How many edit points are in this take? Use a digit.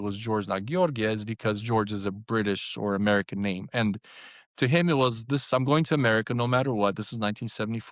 0